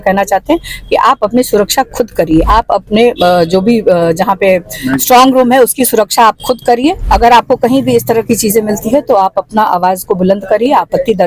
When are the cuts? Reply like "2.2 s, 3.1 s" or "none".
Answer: 2.5 s, 7.0 s